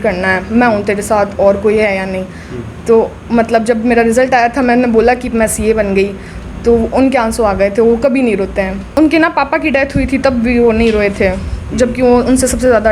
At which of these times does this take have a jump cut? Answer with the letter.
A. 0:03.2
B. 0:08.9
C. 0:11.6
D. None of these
B